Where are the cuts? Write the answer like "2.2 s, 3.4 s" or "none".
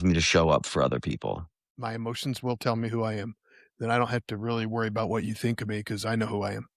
1.6 s